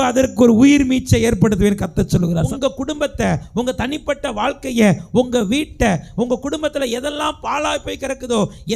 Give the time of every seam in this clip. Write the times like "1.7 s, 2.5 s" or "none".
2.5 s